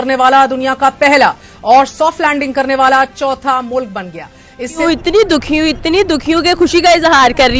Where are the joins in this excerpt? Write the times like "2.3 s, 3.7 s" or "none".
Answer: 4.8 s

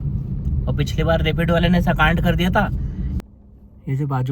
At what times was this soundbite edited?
3.1 s

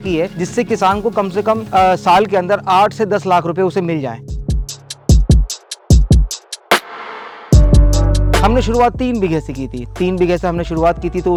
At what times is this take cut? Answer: none

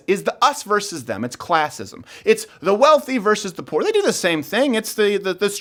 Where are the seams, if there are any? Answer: none

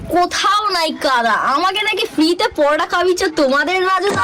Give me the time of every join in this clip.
none

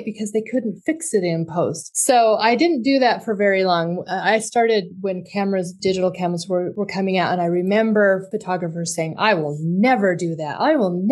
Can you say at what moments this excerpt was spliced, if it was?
1.9 s, 5.7 s, 6.7 s, 8.3 s

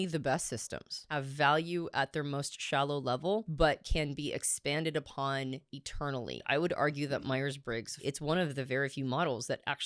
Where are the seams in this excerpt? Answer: 1.0 s, 3.5 s, 6.4 s, 8.0 s

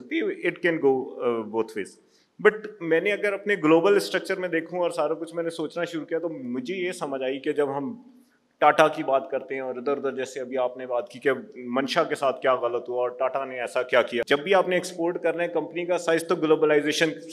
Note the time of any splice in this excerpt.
14.2 s

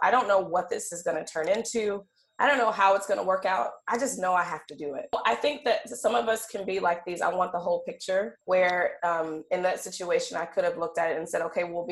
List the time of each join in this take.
5.1 s, 8.4 s

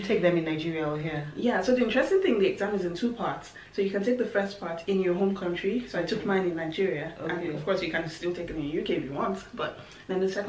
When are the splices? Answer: none

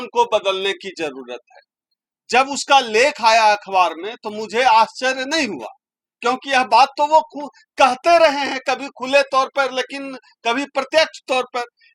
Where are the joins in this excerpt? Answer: none

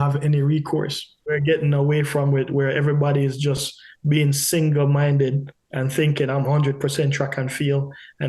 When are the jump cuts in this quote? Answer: 1.2 s

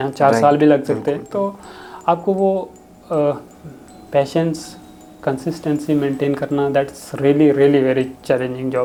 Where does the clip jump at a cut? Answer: none

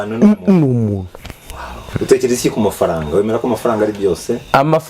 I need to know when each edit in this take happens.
1.9 s

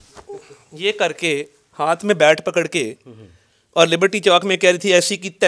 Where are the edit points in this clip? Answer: none

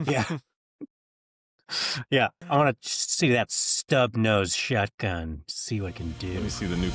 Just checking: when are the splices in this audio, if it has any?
2.4 s

